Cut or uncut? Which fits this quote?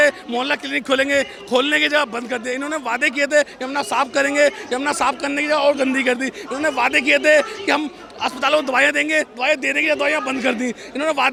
uncut